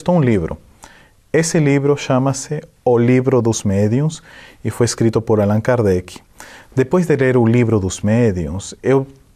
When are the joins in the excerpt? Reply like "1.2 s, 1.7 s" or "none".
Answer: none